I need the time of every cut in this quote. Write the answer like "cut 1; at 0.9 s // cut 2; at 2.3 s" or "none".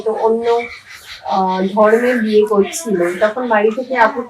none